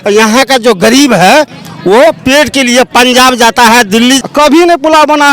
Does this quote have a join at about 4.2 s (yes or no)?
yes